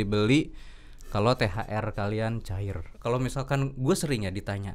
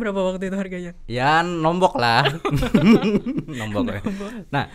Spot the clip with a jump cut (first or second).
first